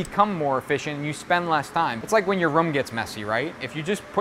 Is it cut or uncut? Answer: cut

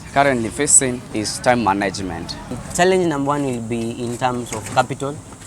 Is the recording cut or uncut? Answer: cut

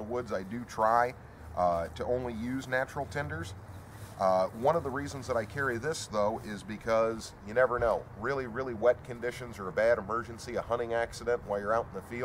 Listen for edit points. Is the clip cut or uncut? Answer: uncut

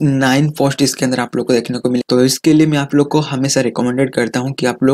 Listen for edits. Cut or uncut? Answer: cut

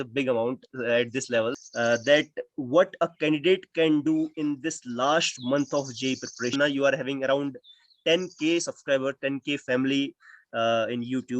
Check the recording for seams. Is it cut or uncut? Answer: cut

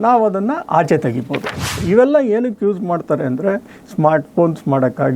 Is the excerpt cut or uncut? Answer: cut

